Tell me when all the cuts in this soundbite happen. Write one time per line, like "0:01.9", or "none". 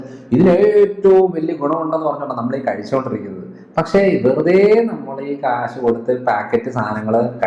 none